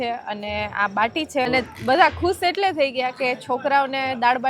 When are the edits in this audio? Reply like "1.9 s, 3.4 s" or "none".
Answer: 1.5 s